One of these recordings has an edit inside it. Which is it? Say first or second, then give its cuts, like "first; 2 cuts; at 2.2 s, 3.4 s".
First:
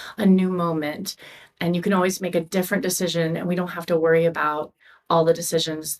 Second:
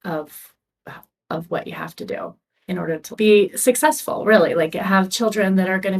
second; 1 cut; at 3.1 s